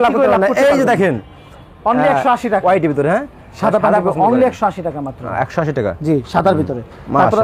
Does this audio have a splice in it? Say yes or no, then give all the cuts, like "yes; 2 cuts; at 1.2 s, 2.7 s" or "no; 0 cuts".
no; 0 cuts